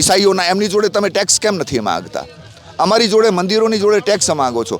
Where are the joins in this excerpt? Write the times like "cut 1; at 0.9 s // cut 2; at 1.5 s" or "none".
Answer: none